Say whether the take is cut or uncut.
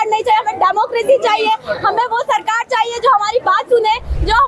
uncut